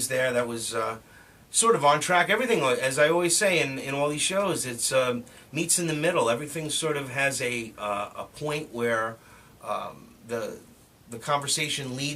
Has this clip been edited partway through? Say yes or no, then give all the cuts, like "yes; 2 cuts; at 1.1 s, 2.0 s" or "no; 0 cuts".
yes; 1 cut; at 7.7 s